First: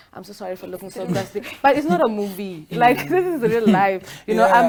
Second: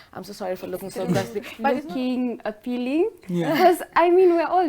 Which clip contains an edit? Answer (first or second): second